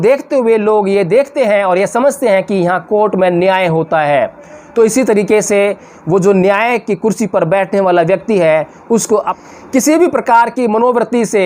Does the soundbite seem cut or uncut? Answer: cut